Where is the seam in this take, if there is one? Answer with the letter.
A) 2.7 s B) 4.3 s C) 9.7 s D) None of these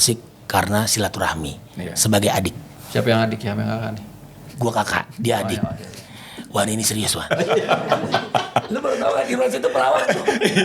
A